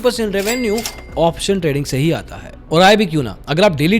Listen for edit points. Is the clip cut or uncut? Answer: uncut